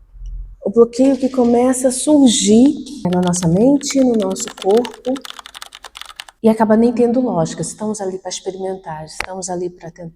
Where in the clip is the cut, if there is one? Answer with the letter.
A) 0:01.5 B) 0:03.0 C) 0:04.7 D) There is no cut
B